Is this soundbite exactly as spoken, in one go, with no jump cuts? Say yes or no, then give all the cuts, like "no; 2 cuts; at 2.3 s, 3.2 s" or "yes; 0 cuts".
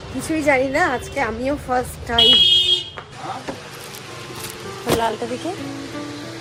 yes; 0 cuts